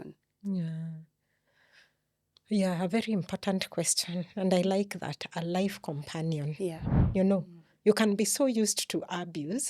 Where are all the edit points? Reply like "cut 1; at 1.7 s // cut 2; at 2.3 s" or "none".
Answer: cut 1; at 6.9 s